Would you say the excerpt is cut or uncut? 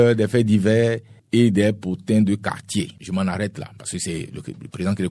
cut